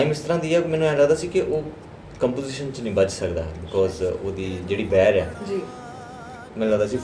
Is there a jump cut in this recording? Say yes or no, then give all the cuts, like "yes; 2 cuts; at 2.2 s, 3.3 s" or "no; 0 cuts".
no; 0 cuts